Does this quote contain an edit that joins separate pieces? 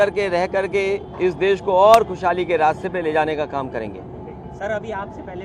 no; 0 cuts

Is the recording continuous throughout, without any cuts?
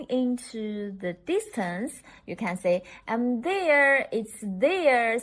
yes; 0 cuts

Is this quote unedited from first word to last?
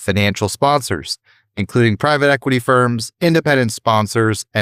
yes; 0 cuts

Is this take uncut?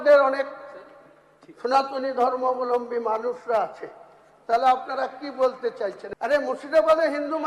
no; 1 cut; at 6.0 s

